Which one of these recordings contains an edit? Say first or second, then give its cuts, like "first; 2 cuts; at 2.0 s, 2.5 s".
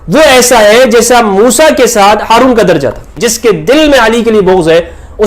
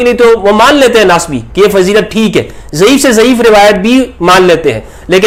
first; 1 cut; at 3.2 s